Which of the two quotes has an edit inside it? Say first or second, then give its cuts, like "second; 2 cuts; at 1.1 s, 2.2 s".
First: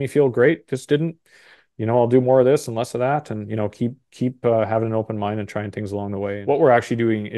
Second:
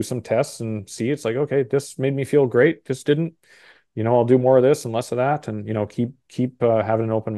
first; 1 cut; at 6.3 s